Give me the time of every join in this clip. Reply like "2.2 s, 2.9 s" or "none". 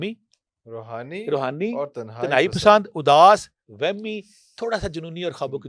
none